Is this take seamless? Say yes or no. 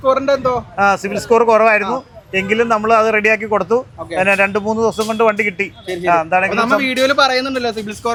yes